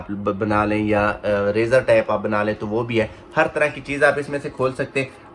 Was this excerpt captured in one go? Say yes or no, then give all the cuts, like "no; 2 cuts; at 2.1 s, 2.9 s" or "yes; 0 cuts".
yes; 0 cuts